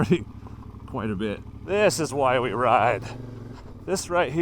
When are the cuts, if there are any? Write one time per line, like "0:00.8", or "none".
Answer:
0:01.5